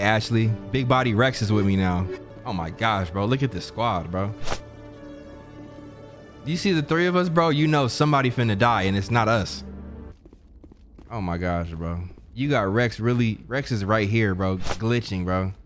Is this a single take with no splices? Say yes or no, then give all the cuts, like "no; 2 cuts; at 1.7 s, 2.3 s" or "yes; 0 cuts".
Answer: no; 3 cuts; at 2.3 s, 6.2 s, 10.1 s